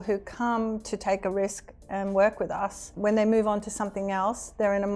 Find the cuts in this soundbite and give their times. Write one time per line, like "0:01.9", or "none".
0:02.8